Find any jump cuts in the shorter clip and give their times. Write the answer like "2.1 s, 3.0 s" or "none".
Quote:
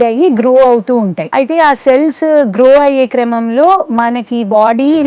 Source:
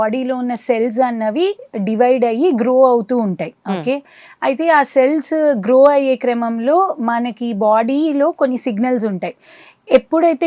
1.2 s